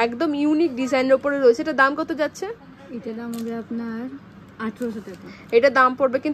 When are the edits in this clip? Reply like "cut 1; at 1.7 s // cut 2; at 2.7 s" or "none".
none